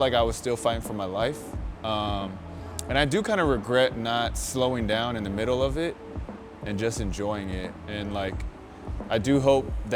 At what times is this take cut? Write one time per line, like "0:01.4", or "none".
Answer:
none

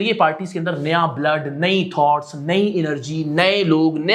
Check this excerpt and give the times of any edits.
none

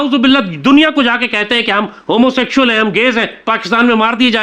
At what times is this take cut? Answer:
none

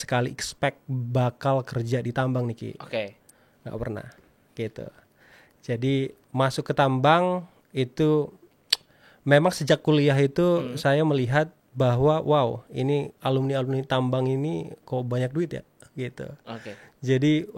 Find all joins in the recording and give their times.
none

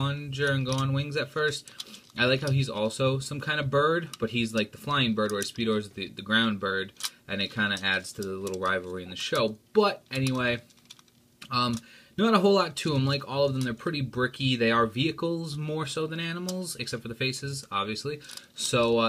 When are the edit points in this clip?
0:17.2

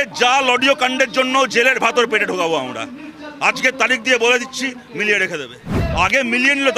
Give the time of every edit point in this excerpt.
0:05.7

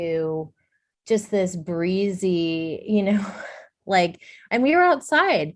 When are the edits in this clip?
none

